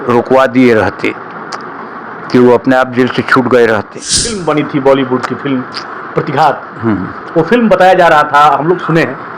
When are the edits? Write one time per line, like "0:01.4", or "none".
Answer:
0:04.4